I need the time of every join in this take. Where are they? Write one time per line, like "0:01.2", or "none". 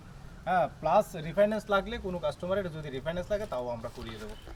none